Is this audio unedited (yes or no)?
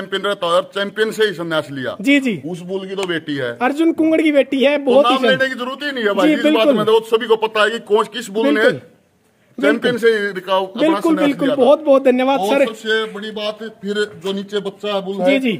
yes